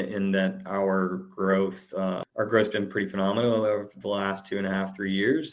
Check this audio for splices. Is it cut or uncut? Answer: cut